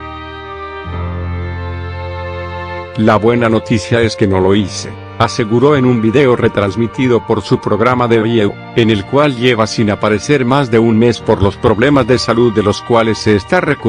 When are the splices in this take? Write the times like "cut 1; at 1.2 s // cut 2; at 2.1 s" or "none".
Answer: cut 1; at 2.9 s